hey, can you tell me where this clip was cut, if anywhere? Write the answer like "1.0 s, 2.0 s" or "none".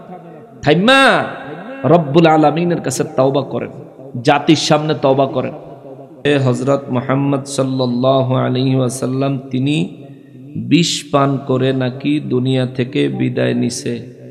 6.3 s